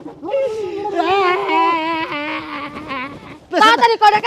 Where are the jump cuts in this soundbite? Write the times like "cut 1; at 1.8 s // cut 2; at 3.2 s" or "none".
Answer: cut 1; at 3.3 s